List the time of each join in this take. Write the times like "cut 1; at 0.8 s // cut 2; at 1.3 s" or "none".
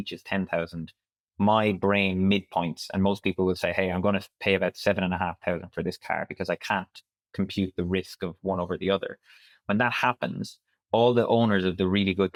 none